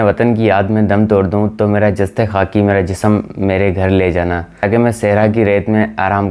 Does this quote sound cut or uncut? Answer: uncut